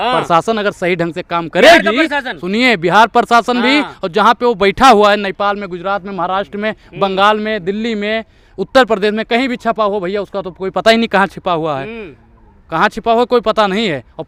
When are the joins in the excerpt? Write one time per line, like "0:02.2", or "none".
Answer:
none